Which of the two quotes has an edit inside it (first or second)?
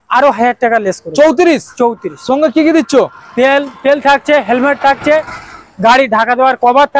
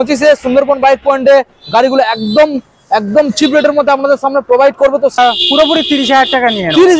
second